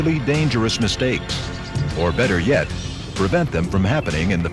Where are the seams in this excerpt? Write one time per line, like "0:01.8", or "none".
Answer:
0:02.6